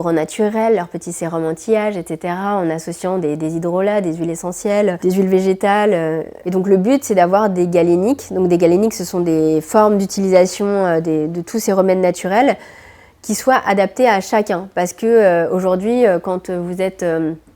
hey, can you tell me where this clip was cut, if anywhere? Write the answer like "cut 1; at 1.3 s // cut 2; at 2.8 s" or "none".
none